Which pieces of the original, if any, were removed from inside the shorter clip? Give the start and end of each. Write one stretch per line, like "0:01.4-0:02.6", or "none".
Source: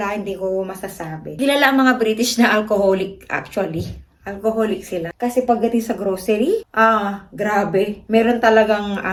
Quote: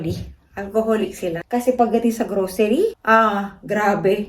none